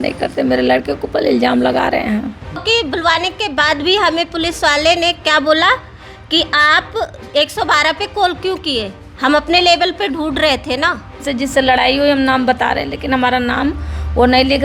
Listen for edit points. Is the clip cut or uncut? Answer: cut